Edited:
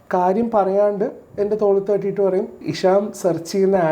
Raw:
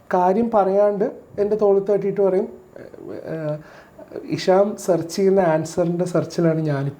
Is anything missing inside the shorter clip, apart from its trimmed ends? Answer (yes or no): yes